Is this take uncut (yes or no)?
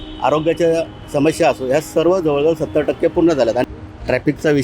no